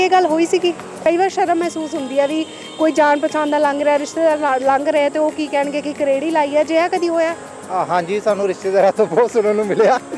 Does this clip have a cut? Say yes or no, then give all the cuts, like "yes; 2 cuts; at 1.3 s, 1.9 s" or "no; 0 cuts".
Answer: yes; 1 cut; at 0.9 s